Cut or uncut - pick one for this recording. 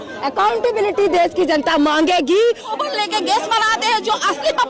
cut